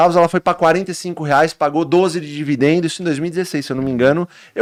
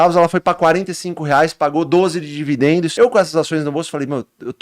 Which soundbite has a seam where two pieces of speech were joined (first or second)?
second